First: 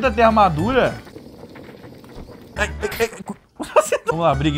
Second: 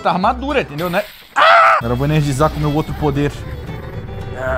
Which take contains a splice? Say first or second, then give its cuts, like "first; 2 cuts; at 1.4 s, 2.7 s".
second; 1 cut; at 1.8 s